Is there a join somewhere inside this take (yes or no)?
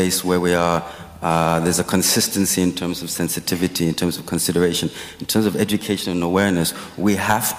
no